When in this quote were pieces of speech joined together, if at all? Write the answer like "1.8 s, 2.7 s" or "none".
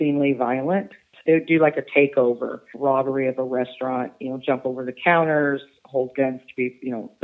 1.1 s, 2.7 s